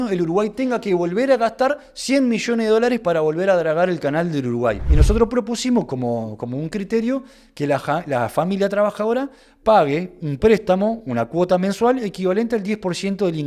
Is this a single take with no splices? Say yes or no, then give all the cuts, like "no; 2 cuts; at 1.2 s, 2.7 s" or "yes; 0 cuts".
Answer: no; 1 cut; at 4.9 s